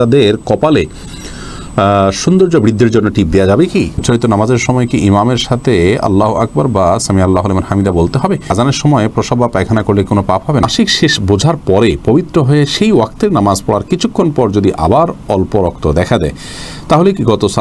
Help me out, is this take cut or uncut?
cut